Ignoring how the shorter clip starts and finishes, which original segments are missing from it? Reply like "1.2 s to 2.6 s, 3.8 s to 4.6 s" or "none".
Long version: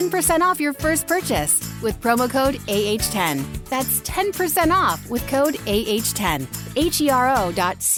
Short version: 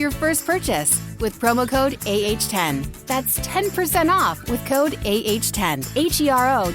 6.4 s to 6.6 s